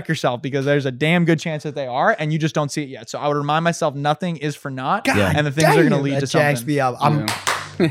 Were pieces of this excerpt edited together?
no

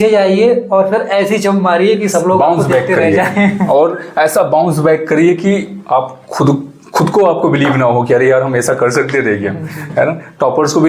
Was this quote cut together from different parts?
no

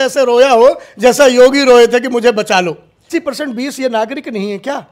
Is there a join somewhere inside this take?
yes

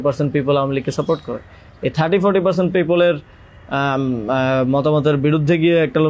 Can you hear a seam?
no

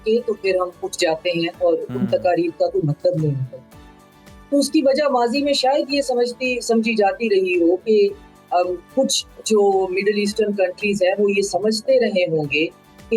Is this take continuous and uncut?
yes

